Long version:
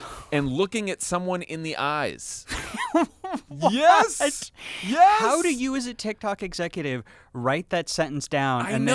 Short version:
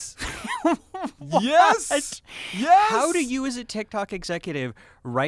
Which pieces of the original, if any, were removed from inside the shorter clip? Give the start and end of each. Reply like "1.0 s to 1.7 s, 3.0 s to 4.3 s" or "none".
none